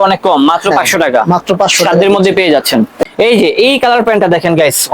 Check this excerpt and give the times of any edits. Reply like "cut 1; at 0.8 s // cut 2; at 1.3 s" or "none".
cut 1; at 2.9 s